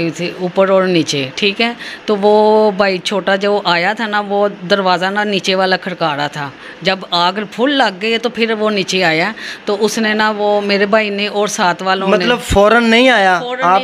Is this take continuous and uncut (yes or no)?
yes